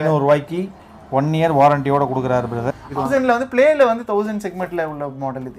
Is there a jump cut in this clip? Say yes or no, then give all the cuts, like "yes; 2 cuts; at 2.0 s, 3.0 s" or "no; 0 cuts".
yes; 1 cut; at 3.0 s